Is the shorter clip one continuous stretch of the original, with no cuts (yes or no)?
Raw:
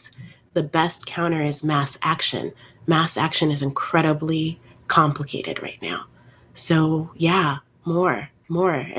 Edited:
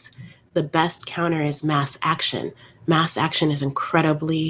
yes